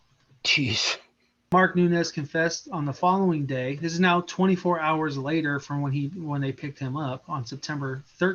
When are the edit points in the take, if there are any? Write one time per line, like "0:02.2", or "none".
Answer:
0:01.5